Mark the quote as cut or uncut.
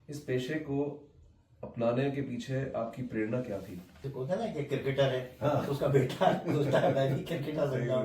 cut